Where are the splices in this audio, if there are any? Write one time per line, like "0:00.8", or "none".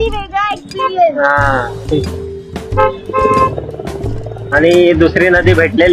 none